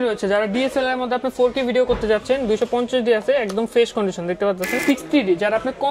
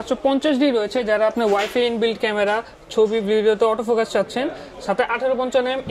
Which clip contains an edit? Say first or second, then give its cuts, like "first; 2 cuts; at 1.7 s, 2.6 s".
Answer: first; 1 cut; at 4.8 s